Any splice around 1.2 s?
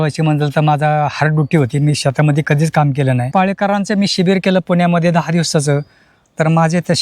no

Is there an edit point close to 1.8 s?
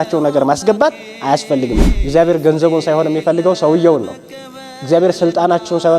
yes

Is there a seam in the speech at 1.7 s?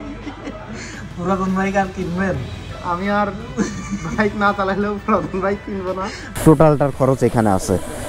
no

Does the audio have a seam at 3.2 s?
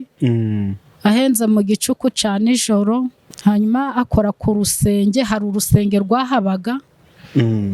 yes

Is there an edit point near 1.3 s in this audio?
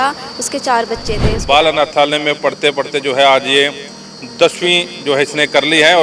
yes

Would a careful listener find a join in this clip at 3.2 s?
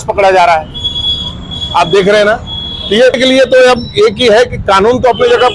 yes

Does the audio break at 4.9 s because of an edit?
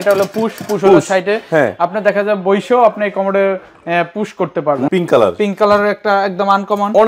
yes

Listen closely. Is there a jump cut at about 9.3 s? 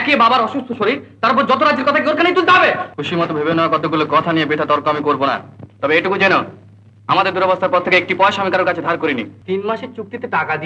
yes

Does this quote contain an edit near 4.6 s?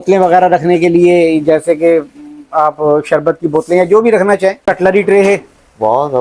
yes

